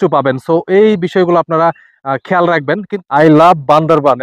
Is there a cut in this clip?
yes; 1 cut; at 2.9 s

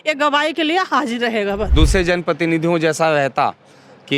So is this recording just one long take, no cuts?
no; 1 cut; at 1.7 s

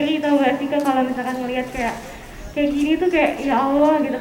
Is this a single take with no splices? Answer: yes; 0 cuts

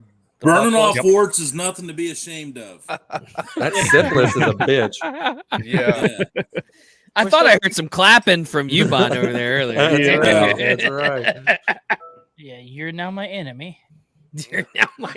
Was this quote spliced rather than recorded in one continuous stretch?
yes; 1 cut; at 12.0 s

